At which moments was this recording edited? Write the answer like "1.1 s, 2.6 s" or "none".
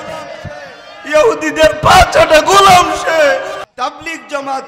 3.6 s